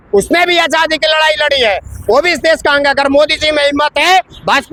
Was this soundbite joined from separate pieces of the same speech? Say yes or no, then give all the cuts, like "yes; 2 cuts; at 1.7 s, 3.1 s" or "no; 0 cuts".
no; 0 cuts